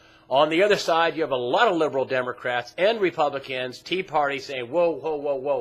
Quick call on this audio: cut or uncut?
uncut